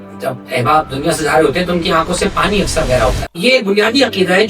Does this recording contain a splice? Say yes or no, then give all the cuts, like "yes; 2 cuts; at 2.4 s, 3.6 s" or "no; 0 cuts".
yes; 1 cut; at 3.3 s